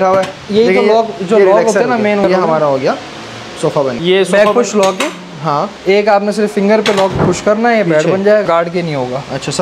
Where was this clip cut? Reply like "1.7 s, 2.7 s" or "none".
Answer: 2.2 s, 4.0 s, 8.4 s